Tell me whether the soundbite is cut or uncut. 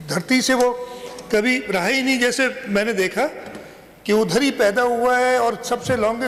uncut